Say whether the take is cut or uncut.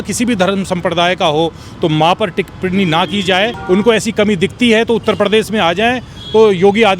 cut